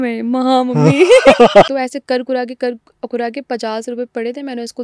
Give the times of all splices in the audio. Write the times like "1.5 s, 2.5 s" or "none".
1.7 s